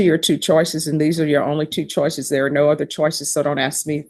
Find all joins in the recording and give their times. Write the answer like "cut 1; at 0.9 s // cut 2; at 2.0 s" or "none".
none